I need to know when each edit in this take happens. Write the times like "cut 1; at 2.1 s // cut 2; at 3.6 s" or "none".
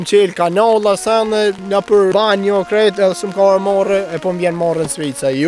cut 1; at 2.0 s